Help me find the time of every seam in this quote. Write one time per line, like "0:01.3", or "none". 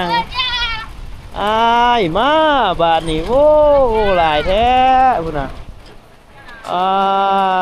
none